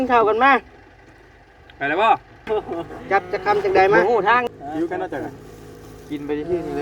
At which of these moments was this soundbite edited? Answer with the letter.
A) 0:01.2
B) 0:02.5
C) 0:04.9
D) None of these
B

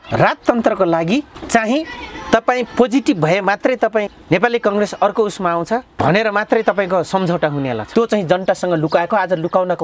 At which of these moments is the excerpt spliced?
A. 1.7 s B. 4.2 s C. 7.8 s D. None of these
C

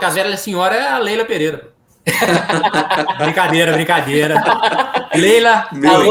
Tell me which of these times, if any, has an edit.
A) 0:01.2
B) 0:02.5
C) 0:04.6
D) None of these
D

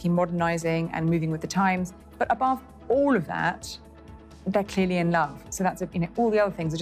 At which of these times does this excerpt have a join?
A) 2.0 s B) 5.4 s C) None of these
A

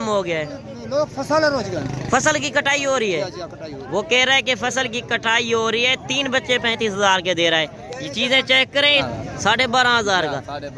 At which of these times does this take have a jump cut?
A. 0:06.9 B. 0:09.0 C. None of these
B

